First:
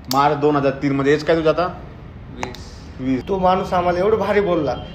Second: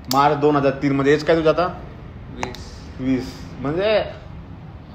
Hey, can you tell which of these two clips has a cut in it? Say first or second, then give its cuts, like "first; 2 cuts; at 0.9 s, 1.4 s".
first; 1 cut; at 3.2 s